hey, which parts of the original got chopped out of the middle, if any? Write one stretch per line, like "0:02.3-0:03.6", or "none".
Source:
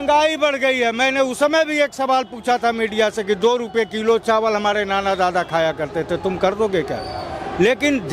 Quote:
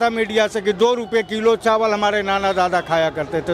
none